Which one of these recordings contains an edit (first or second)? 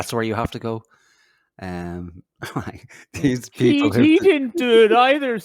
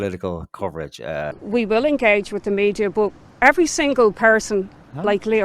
second